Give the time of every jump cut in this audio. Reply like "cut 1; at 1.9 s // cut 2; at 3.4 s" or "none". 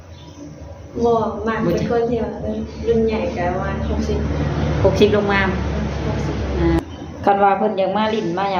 cut 1; at 6.8 s